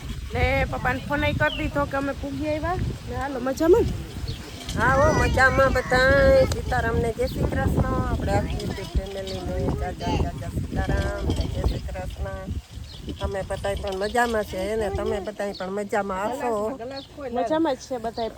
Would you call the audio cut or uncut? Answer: uncut